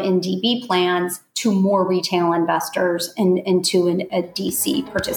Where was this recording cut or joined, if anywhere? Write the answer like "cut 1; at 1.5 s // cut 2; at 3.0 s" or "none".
none